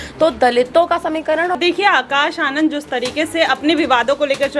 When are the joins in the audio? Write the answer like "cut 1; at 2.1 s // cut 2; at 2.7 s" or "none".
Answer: cut 1; at 1.6 s